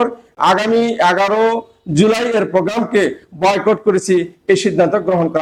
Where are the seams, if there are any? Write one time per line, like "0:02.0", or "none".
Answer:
none